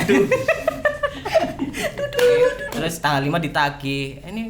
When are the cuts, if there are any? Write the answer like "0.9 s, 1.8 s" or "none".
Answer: 2.7 s